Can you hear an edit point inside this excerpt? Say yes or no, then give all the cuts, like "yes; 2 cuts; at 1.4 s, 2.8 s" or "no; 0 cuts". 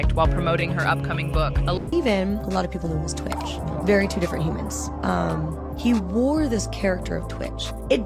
yes; 1 cut; at 1.8 s